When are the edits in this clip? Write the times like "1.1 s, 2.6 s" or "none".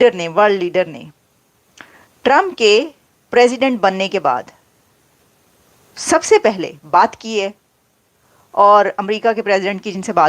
none